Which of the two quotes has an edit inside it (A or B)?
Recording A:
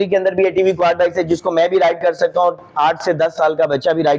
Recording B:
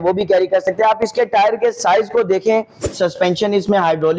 B